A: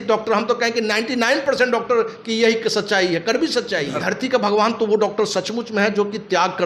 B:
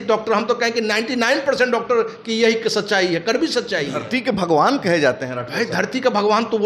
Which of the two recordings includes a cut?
A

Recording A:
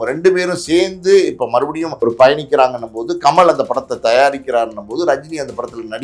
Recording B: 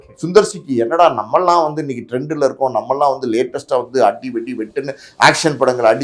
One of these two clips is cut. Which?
A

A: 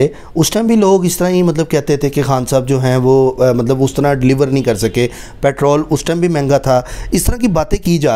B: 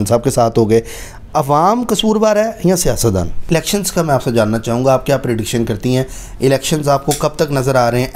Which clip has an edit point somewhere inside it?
B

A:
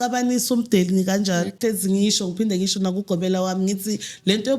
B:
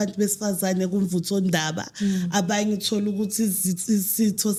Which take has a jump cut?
A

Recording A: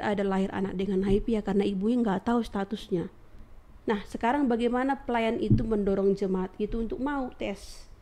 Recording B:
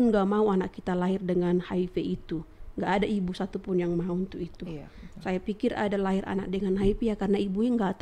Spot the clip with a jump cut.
A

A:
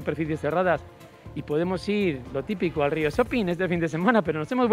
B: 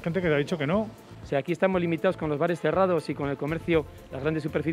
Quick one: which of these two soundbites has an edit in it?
B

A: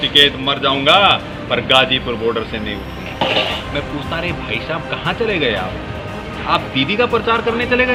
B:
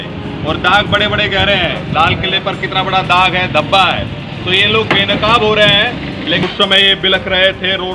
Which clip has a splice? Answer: B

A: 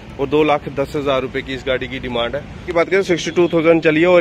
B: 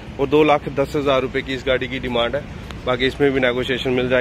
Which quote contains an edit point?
A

